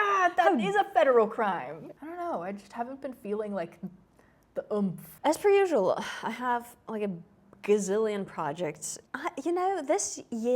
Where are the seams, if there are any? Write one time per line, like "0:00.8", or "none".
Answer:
0:01.9
0:05.1
0:09.1